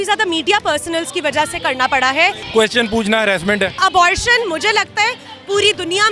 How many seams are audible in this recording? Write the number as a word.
two